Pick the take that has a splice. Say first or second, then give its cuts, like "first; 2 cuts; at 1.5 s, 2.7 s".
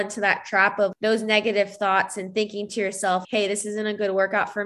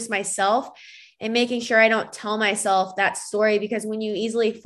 first; 2 cuts; at 0.9 s, 3.2 s